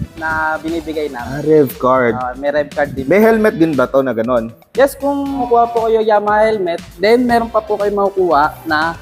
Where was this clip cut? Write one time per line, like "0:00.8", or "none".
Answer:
0:05.5